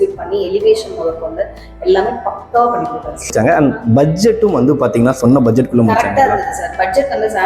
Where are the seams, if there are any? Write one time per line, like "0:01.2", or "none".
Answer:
0:03.3